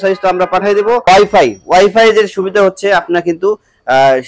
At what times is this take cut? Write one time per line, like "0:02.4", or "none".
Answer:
0:01.1